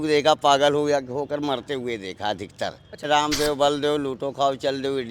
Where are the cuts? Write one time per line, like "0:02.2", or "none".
0:03.0